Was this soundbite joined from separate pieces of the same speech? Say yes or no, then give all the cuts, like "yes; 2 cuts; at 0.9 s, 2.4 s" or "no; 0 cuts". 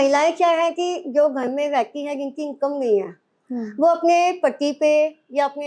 no; 0 cuts